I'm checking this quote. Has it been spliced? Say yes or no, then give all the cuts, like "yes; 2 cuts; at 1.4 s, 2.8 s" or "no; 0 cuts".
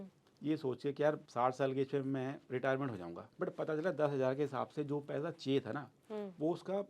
yes; 2 cuts; at 1.2 s, 3.2 s